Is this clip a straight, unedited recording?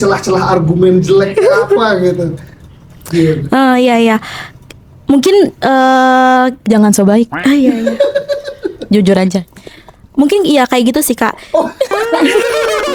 yes; 0 cuts

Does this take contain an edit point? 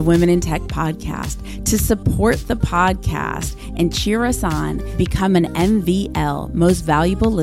no; 0 cuts

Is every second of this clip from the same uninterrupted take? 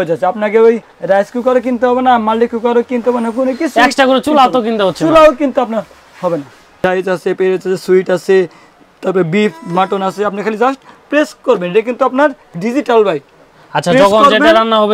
no; 1 cut; at 6.6 s

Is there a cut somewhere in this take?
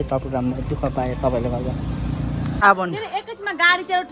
yes; 1 cut; at 2.6 s

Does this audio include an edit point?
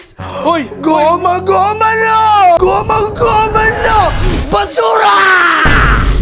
yes; 1 cut; at 2.6 s

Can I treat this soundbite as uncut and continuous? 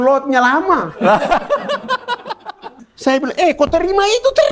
no; 1 cut; at 2.9 s

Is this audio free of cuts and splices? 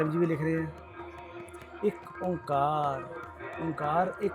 yes; 0 cuts

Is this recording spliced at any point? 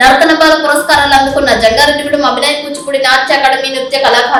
no; 0 cuts

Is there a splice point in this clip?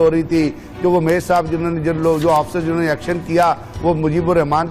no; 0 cuts

